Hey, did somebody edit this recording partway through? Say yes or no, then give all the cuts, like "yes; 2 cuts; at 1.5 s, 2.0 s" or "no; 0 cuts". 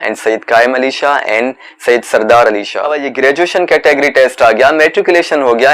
yes; 1 cut; at 3.0 s